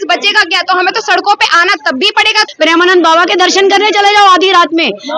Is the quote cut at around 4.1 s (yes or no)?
no